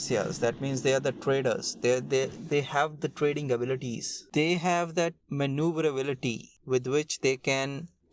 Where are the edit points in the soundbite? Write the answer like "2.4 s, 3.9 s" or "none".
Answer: none